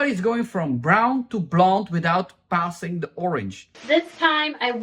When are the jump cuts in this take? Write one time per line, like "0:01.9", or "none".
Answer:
0:03.7